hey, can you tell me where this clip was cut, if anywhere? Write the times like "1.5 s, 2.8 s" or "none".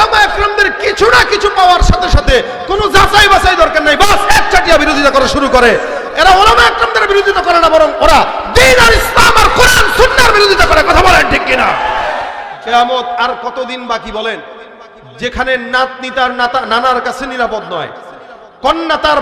12.5 s